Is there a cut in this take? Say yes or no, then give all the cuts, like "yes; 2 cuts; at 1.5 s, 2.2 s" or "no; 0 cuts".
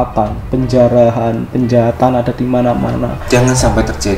no; 0 cuts